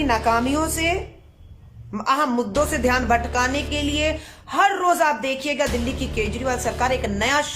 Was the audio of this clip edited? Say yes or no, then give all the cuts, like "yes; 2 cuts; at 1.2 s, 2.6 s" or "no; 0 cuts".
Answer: no; 0 cuts